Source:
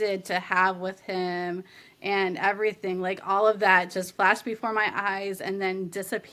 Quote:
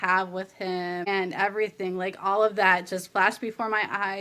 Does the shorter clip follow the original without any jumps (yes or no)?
no